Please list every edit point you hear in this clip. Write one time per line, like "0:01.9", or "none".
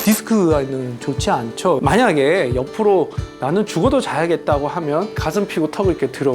0:01.8